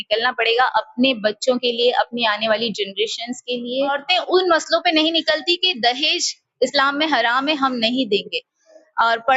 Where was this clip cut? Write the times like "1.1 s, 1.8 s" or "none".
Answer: 4.0 s